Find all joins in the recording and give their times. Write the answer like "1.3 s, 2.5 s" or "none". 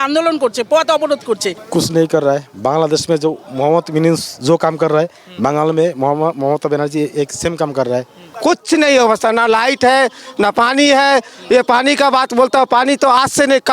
1.5 s, 8.2 s